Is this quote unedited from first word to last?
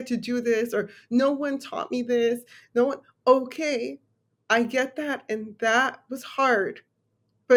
yes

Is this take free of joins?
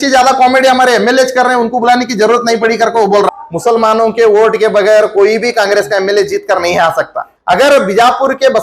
no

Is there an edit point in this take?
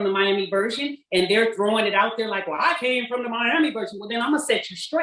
no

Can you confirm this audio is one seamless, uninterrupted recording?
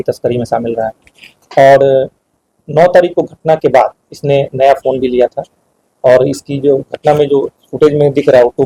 yes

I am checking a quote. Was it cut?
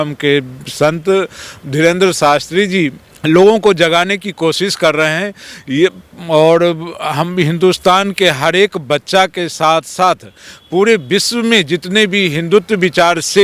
yes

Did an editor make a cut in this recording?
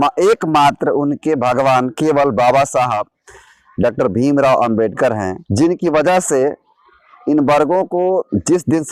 yes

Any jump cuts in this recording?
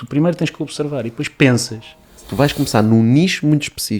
yes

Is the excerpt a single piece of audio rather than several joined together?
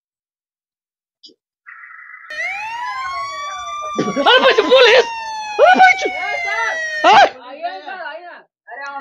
yes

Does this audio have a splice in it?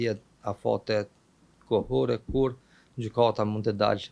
no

